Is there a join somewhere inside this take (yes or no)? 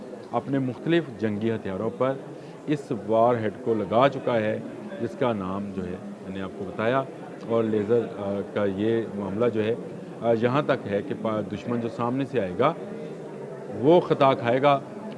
no